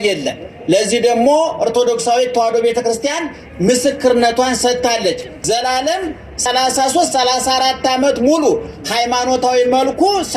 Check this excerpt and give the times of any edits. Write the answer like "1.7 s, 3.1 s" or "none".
5.3 s, 6.4 s

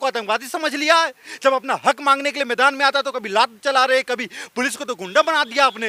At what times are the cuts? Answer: none

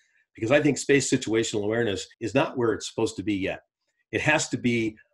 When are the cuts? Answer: 2.1 s

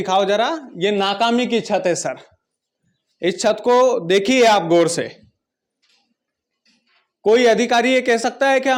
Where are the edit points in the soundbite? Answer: none

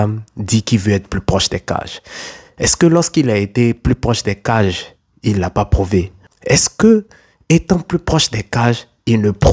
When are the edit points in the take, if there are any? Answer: 6.2 s

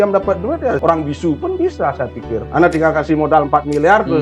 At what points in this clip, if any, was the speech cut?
0.8 s, 2.4 s

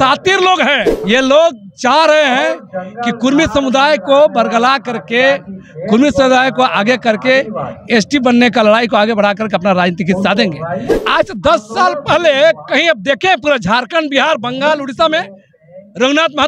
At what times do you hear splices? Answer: 0.9 s, 10.9 s

